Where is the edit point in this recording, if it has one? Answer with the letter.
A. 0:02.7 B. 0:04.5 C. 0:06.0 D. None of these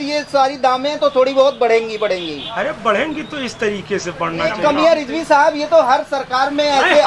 B